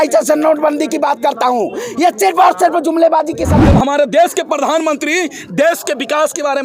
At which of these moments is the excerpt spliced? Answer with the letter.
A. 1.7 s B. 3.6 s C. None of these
B